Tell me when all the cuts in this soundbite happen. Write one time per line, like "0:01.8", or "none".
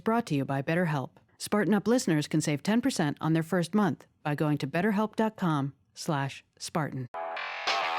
0:07.1